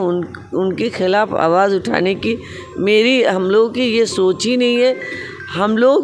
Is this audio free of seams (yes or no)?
yes